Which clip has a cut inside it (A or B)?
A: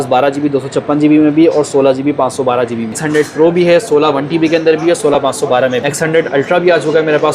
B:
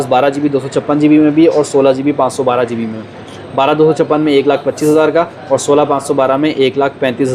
A